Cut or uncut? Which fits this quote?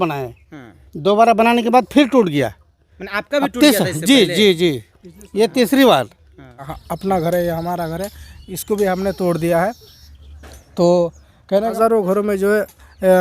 cut